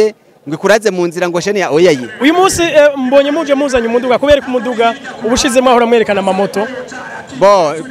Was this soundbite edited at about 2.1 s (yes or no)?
yes